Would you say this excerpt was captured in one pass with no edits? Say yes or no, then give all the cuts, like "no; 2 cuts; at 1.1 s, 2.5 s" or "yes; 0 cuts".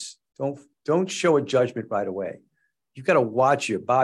yes; 0 cuts